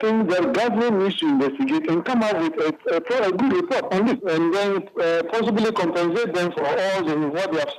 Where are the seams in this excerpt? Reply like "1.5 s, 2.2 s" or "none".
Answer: 4.2 s, 6.5 s